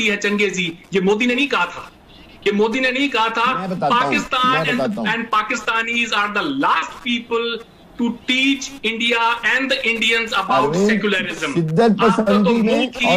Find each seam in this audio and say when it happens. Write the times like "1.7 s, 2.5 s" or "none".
none